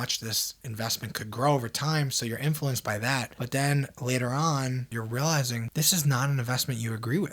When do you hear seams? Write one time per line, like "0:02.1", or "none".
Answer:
0:04.9